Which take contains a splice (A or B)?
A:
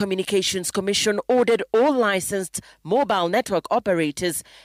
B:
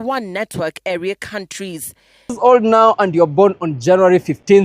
B